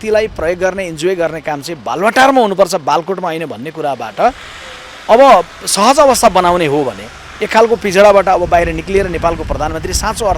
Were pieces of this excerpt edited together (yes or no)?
no